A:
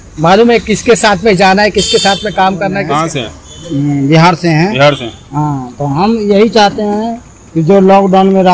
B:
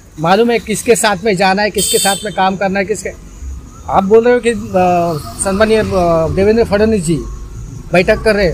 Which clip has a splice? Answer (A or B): A